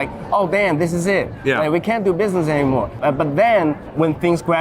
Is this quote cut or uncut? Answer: cut